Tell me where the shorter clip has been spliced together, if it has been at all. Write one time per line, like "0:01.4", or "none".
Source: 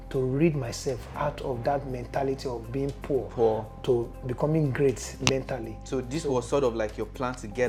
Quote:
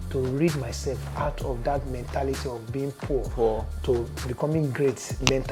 none